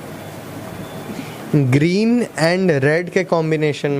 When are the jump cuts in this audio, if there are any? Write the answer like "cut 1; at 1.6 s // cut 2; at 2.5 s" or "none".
cut 1; at 1.1 s